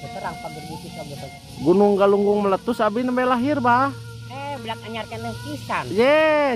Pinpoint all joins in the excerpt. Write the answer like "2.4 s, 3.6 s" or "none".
1.3 s